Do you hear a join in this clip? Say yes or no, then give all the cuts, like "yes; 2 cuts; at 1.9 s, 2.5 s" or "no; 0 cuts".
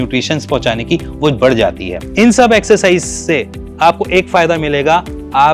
yes; 1 cut; at 1.9 s